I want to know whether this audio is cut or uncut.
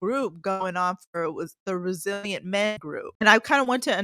cut